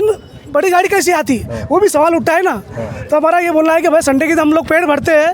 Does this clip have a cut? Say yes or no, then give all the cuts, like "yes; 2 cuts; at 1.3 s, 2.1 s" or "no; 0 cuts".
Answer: no; 0 cuts